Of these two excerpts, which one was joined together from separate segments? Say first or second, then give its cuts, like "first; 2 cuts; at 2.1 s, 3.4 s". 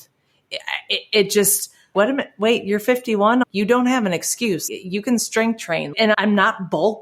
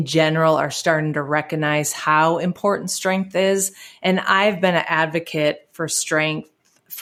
first; 4 cuts; at 1.9 s, 3.4 s, 4.6 s, 6.1 s